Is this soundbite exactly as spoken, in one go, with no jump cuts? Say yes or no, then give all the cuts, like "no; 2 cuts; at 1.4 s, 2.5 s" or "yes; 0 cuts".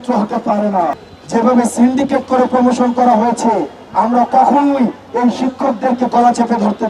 no; 1 cut; at 0.9 s